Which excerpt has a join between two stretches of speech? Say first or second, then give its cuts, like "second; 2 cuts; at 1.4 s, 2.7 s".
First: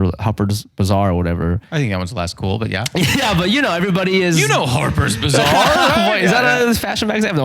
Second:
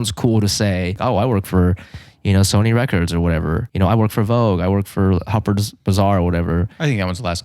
second; 2 cuts; at 1.0 s, 3.6 s